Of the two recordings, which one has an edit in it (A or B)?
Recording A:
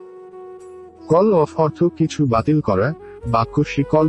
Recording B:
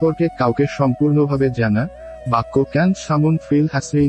A